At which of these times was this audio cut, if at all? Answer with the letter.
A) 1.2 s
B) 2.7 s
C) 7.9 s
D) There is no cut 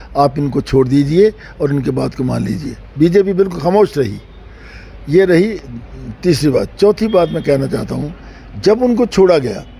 D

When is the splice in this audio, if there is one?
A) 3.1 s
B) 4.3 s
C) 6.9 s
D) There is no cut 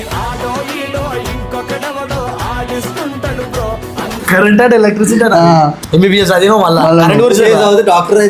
D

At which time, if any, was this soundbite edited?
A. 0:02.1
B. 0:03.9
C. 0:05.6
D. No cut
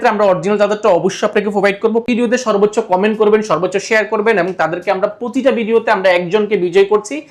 A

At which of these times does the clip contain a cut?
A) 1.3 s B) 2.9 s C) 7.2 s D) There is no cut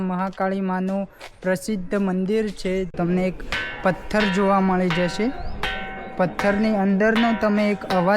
B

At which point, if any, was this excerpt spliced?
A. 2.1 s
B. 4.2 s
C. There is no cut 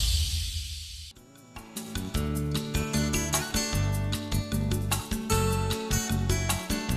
A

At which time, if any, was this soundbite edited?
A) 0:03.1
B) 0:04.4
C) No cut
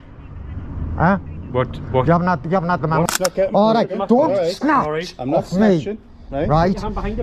A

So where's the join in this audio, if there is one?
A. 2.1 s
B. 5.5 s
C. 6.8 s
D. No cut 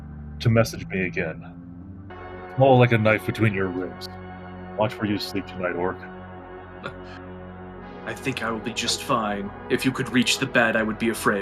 A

